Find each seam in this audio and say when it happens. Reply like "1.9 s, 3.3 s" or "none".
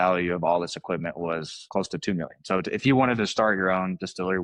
1.7 s